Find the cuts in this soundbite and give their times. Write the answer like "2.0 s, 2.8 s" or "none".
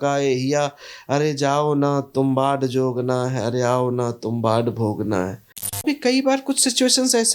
5.8 s